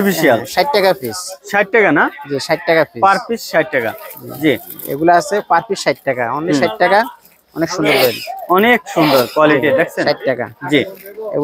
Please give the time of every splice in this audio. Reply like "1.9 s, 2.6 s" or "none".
none